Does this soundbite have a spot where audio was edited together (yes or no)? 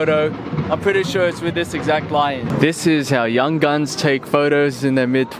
yes